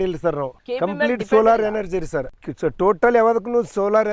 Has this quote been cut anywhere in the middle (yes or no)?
no